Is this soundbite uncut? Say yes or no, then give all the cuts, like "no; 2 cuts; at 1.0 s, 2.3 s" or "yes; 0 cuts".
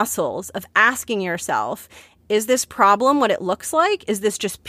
yes; 0 cuts